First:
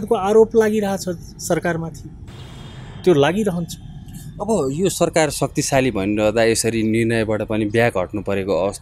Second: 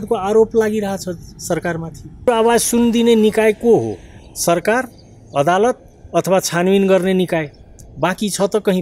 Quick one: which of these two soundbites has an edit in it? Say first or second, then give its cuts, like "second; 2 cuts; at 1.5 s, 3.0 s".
second; 1 cut; at 2.2 s